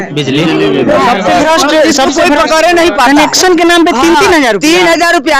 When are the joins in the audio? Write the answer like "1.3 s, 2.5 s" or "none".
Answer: 3.1 s